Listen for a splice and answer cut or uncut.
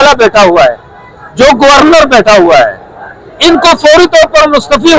uncut